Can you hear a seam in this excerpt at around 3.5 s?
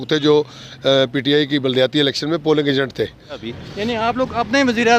yes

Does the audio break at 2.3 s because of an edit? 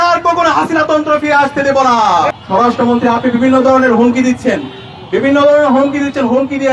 yes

